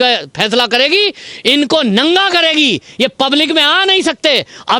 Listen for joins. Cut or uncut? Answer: uncut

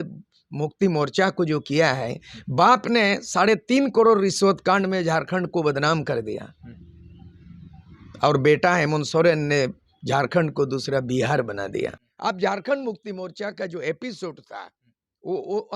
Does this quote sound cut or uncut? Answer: cut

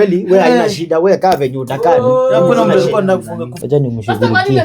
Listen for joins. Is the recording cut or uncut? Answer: cut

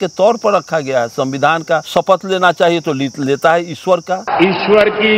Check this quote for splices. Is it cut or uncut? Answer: cut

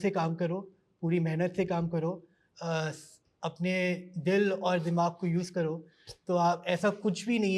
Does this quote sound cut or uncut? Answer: uncut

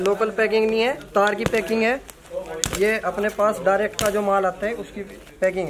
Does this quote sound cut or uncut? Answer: uncut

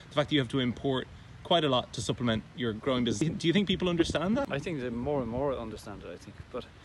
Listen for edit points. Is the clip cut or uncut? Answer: cut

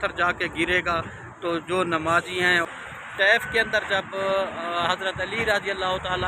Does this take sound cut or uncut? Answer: cut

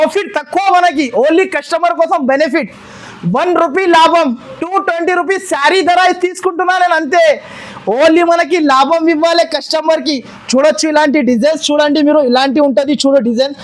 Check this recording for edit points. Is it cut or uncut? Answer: uncut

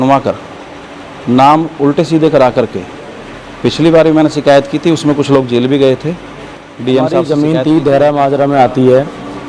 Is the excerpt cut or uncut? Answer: cut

